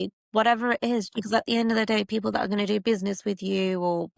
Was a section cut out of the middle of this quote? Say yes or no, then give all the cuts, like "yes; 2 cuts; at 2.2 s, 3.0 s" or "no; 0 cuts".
yes; 1 cut; at 1.1 s